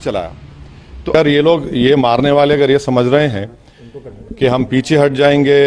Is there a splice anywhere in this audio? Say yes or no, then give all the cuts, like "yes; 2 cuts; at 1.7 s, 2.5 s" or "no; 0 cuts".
yes; 1 cut; at 1.1 s